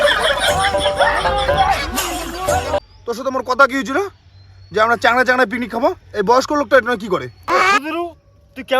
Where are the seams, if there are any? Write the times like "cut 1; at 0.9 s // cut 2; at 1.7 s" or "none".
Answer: cut 1; at 2.8 s